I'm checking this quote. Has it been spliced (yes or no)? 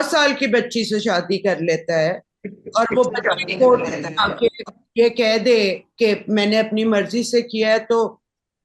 no